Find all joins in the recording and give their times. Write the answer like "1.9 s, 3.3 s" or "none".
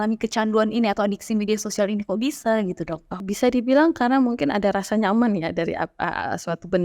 3.2 s